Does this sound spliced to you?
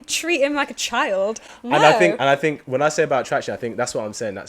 no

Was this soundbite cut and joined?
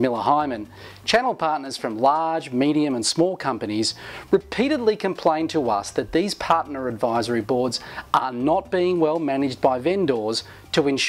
yes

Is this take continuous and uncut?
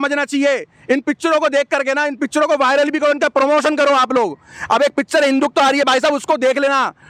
yes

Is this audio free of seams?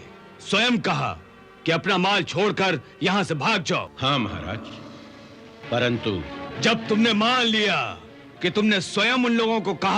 no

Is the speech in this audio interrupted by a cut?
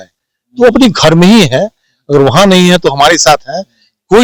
no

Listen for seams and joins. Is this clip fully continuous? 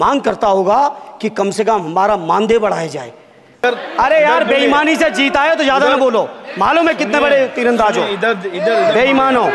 no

